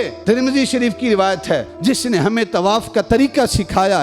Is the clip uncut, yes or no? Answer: no